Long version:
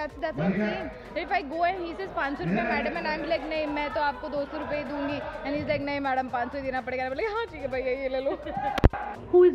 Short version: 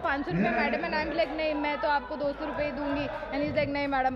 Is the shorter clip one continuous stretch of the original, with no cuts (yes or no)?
yes